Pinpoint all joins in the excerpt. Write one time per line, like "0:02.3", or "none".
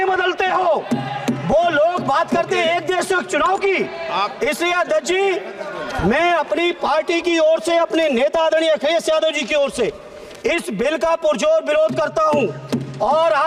none

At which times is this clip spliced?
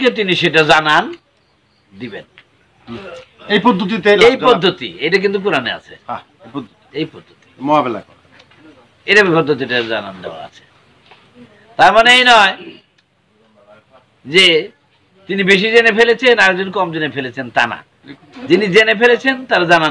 none

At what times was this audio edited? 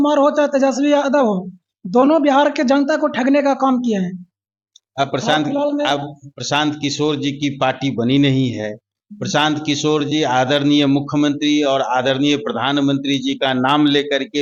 none

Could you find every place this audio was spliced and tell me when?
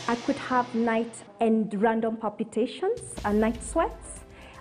0:01.2

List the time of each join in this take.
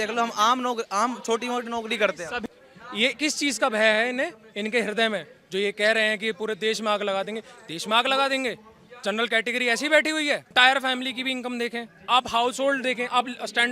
0:02.4
0:10.5

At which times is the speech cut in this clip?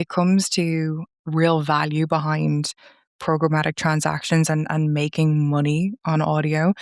0:01.2

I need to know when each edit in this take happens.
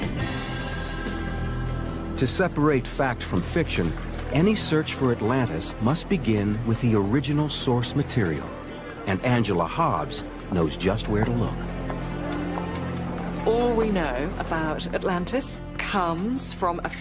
0:13.6

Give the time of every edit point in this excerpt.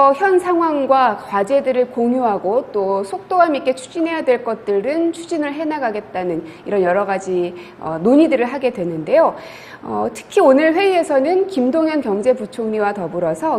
0:01.3

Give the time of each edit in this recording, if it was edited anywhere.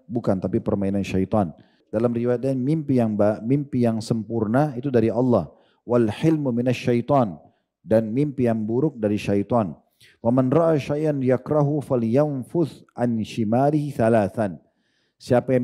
0:01.8

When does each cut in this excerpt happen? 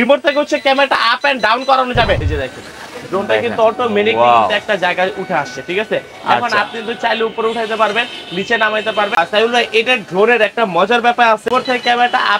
0:02.3
0:11.5

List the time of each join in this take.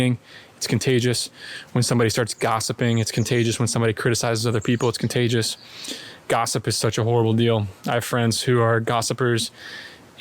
none

